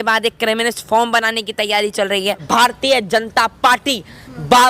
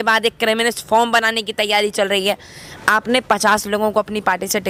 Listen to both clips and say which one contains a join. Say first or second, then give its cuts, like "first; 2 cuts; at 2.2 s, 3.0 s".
first; 1 cut; at 2.4 s